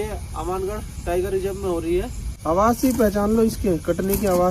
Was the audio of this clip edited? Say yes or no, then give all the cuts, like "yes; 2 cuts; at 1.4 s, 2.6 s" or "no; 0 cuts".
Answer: yes; 1 cut; at 2.2 s